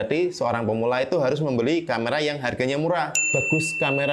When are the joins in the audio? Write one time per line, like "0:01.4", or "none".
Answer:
0:03.2

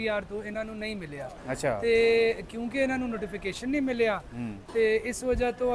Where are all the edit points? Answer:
none

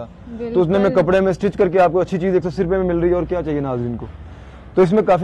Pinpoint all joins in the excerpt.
none

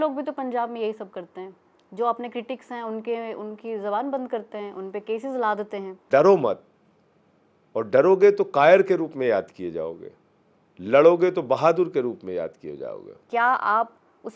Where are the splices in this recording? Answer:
0:06.0
0:13.2

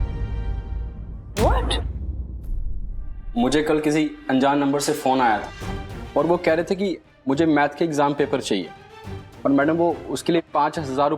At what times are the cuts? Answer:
0:03.2

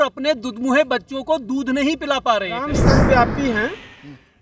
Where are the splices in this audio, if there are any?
0:02.7

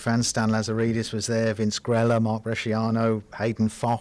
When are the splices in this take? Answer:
none

